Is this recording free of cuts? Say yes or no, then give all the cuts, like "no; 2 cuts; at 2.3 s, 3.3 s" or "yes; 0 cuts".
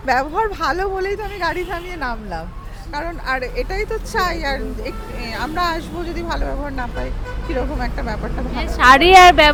yes; 0 cuts